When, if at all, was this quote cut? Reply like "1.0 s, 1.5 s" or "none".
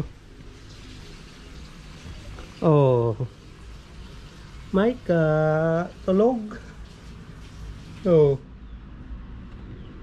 none